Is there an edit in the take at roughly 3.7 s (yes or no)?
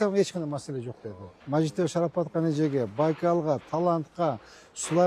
no